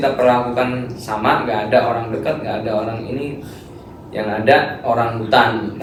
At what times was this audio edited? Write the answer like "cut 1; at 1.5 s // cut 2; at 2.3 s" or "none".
none